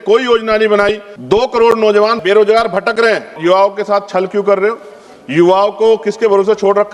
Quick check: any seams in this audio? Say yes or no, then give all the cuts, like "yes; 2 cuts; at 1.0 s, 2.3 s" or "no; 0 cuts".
yes; 3 cuts; at 1.1 s, 2.2 s, 3.4 s